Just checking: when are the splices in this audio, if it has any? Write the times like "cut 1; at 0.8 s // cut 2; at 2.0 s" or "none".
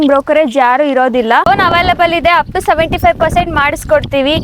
cut 1; at 1.5 s